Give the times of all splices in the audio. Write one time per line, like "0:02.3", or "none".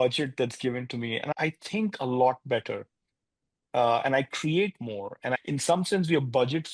0:01.3
0:05.4